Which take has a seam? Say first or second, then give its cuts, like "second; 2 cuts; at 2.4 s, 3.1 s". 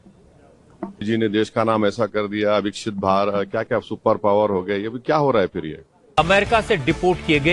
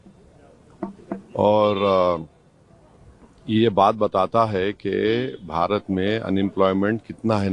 first; 2 cuts; at 1.0 s, 6.1 s